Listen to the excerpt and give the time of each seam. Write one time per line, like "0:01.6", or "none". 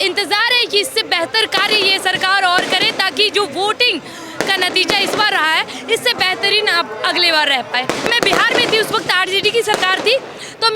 0:08.1